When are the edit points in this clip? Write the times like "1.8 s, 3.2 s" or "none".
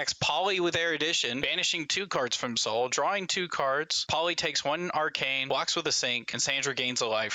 1.5 s, 4.0 s, 5.4 s, 6.3 s

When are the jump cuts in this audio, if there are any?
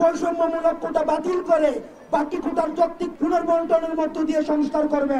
3.1 s

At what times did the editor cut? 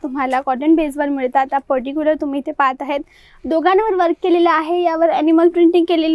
none

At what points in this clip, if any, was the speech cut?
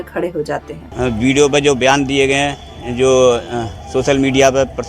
0.9 s

